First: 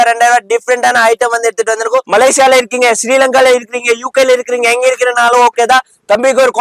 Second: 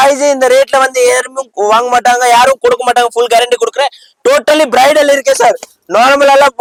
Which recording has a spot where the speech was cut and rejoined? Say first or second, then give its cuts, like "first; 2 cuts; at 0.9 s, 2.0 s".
first; 1 cut; at 2.1 s